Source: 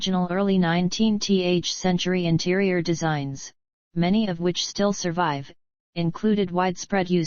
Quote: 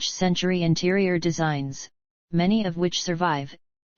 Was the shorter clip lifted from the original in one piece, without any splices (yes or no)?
no